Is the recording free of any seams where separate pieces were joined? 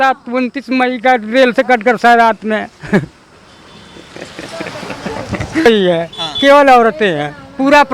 no; 1 cut; at 5.7 s

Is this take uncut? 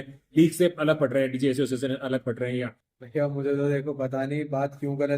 no; 1 cut; at 2.8 s

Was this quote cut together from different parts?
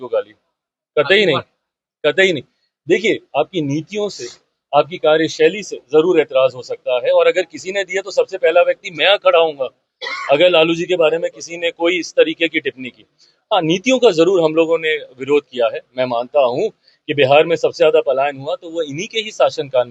no; 0 cuts

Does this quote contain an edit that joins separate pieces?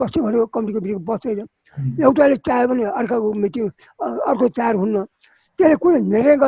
no; 0 cuts

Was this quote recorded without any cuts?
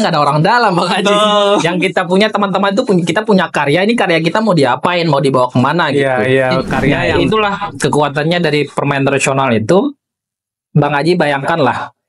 no; 1 cut; at 7.0 s

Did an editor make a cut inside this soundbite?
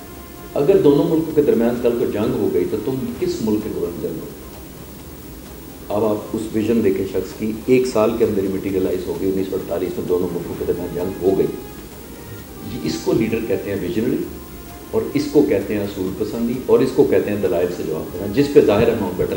no; 0 cuts

